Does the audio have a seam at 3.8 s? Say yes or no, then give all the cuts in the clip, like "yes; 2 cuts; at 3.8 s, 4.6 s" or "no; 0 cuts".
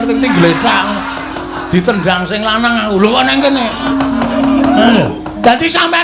yes; 1 cut; at 3.8 s